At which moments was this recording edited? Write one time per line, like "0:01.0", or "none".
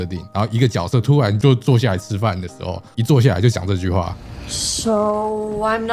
none